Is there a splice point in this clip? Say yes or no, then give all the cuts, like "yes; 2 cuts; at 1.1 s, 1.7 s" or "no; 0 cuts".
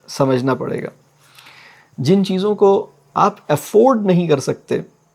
no; 0 cuts